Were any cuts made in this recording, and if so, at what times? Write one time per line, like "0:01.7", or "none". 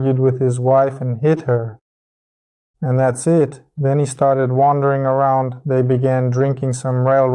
none